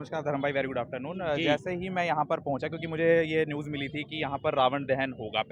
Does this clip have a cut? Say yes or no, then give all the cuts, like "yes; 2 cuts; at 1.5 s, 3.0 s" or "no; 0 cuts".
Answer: no; 0 cuts